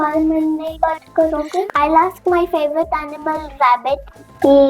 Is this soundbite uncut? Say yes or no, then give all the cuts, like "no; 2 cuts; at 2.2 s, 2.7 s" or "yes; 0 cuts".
no; 1 cut; at 1.6 s